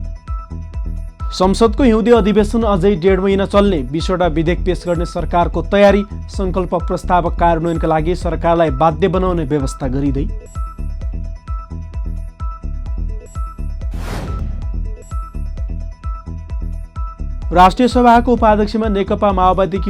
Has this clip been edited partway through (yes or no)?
yes